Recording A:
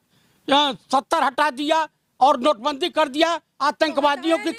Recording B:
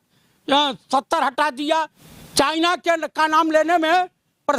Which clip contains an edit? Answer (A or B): B